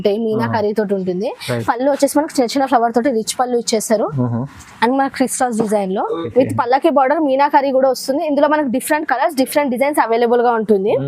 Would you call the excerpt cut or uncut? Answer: cut